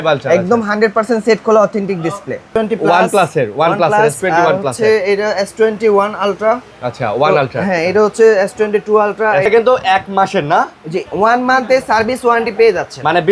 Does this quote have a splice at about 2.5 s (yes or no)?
yes